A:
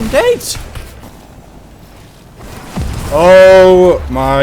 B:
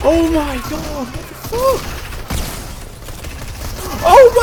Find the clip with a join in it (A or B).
A